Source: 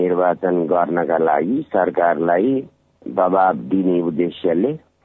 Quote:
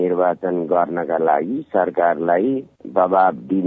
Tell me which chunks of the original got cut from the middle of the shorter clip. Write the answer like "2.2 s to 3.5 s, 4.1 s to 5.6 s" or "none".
2.7 s to 3.0 s